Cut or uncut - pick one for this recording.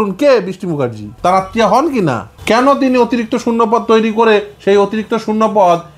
cut